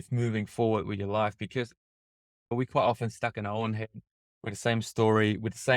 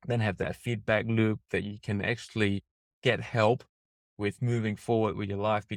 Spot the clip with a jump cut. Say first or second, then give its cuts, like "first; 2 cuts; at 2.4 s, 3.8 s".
first; 1 cut; at 2.5 s